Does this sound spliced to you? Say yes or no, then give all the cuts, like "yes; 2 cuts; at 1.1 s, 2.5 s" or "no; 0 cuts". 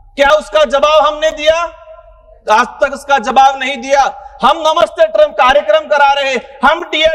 no; 0 cuts